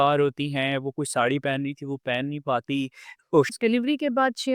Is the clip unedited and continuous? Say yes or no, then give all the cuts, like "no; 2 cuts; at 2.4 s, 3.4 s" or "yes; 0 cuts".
no; 1 cut; at 3.5 s